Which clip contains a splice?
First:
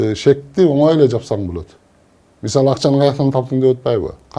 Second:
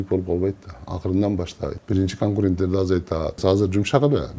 second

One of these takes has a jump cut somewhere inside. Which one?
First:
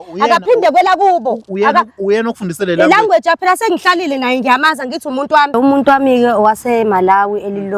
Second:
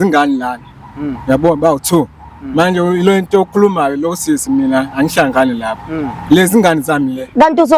first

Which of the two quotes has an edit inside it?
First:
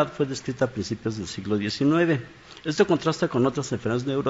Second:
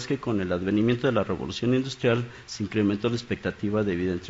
second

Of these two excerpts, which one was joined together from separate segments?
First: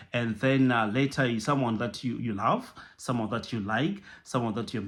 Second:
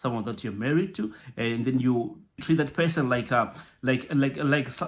second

